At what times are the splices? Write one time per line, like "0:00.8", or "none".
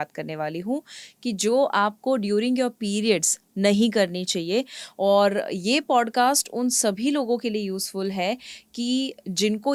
none